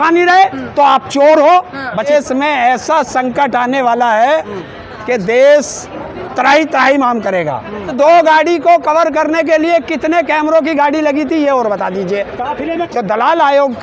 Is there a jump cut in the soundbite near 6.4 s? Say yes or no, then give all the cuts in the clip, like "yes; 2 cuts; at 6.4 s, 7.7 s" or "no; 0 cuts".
no; 3 cuts; at 2.1 s, 7.9 s, 12.9 s